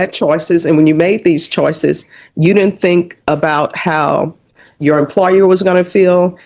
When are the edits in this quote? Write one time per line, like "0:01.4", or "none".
none